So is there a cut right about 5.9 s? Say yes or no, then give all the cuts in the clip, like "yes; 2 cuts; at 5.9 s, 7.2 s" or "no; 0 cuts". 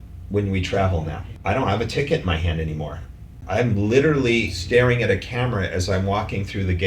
no; 3 cuts; at 1.2 s, 3.3 s, 4.6 s